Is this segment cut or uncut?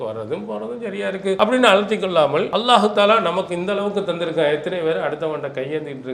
cut